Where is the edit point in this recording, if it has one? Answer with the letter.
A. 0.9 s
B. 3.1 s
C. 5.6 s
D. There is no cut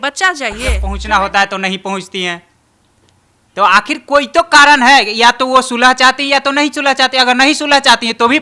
A